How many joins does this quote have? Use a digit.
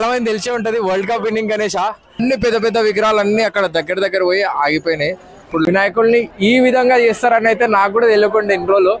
2